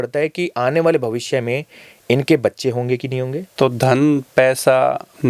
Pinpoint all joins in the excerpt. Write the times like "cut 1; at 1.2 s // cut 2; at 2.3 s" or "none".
cut 1; at 3.4 s